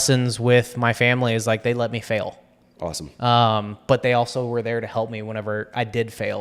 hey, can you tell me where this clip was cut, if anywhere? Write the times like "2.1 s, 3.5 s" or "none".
none